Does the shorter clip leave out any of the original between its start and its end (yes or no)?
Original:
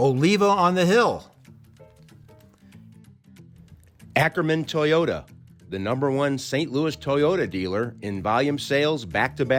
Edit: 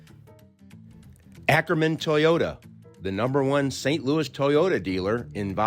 yes